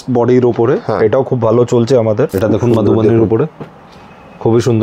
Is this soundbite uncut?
no; 1 cut; at 2.3 s

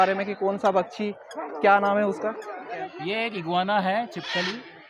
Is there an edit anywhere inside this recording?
yes; 1 cut; at 2.7 s

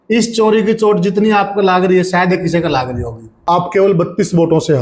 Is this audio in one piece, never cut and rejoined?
no; 1 cut; at 3.3 s

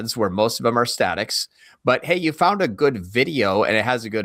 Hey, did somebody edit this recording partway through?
no; 0 cuts

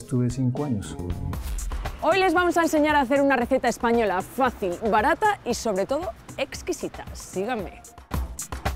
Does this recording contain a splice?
yes; 1 cut; at 1.3 s

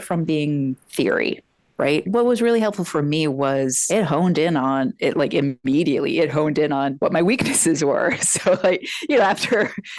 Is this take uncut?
no; 2 cuts; at 2.0 s, 3.8 s

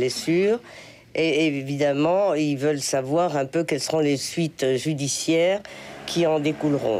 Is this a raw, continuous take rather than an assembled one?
yes; 0 cuts

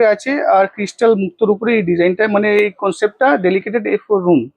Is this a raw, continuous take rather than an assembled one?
yes; 0 cuts

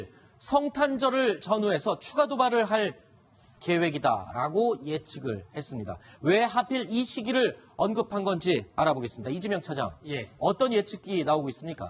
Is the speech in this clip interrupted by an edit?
no; 0 cuts

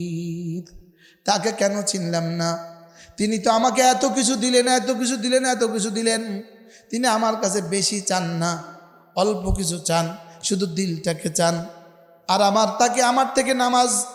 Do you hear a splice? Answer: no; 0 cuts

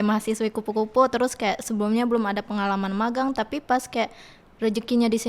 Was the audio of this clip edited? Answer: no; 0 cuts

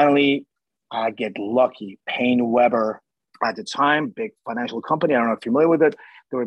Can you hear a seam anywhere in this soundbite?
yes; 1 cut; at 3.0 s

